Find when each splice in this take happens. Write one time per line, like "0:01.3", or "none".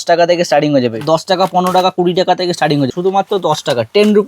0:01.0
0:02.9